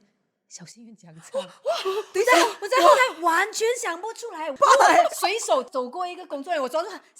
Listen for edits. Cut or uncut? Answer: cut